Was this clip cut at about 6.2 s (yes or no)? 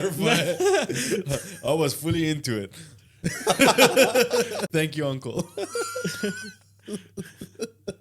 no